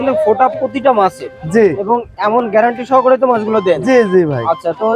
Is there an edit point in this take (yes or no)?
no